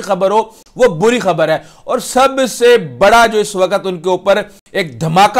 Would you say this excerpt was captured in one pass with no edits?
yes; 0 cuts

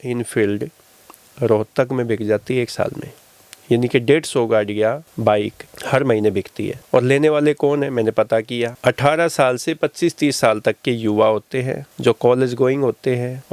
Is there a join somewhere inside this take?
no; 0 cuts

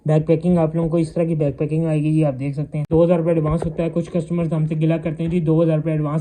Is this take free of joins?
no; 1 cut; at 2.9 s

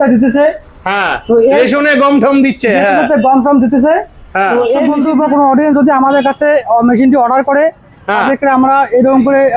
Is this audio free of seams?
no; 1 cut; at 4.9 s

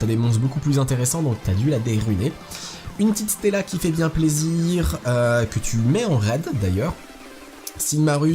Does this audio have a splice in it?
yes; 1 cut; at 5.6 s

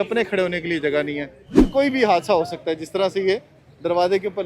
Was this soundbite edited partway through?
yes; 1 cut; at 1.5 s

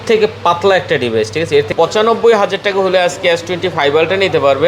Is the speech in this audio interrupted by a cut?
yes; 1 cut; at 1.7 s

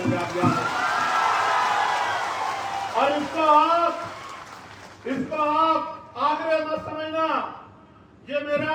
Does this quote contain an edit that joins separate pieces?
no; 0 cuts

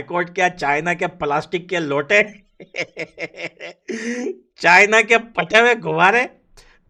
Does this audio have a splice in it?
no; 0 cuts

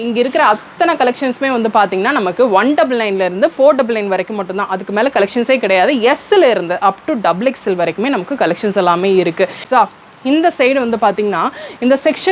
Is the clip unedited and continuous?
no; 1 cut; at 9.6 s

